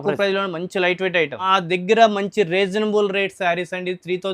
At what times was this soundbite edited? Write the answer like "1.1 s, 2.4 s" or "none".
1.5 s

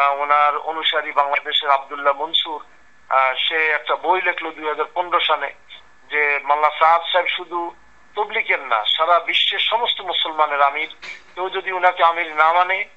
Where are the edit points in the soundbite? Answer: none

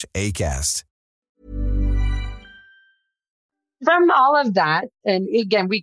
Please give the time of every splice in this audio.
none

